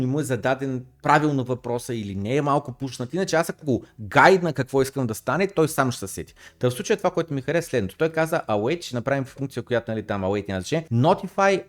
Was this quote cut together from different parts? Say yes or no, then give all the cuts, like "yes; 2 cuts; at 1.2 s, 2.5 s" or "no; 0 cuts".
no; 0 cuts